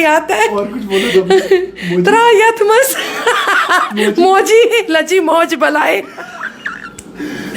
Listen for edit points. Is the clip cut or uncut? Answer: uncut